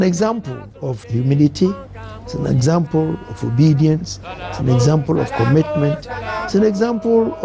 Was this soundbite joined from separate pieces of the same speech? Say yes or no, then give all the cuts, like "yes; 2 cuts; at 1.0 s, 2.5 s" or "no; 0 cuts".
yes; 1 cut; at 1.1 s